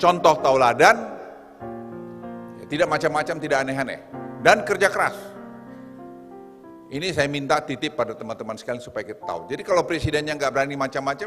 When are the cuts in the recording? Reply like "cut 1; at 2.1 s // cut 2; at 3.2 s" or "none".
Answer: cut 1; at 5.3 s // cut 2; at 6.8 s

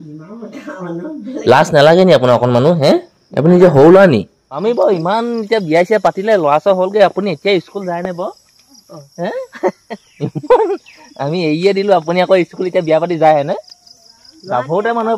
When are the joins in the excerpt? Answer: cut 1; at 4.4 s

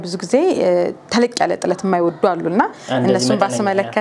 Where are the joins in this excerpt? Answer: none

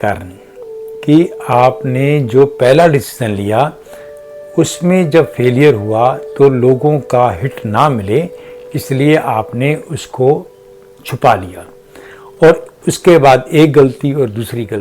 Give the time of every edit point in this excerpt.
none

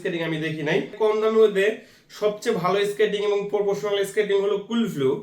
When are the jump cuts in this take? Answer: cut 1; at 0.9 s

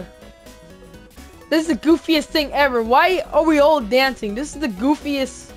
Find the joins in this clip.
cut 1; at 1.3 s

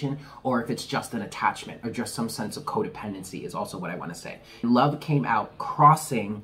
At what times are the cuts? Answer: cut 1; at 4.6 s

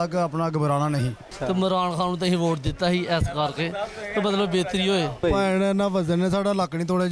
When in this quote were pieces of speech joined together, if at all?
cut 1; at 1.3 s // cut 2; at 5.2 s

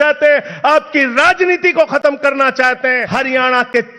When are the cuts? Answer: cut 1; at 3.0 s

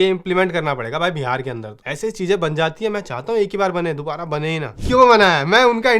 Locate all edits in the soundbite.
cut 1; at 4.6 s

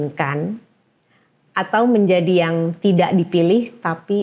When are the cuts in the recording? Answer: none

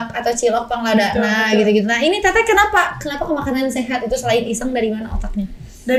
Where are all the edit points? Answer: none

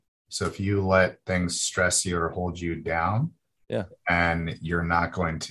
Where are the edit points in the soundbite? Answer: none

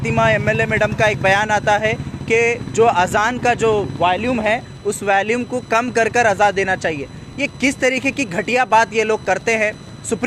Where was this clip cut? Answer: none

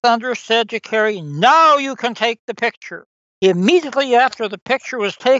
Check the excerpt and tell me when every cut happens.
cut 1; at 3.2 s

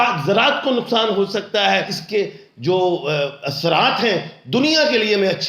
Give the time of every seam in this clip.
cut 1; at 1.5 s

